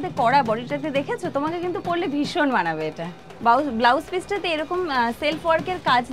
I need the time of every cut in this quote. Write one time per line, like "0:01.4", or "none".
none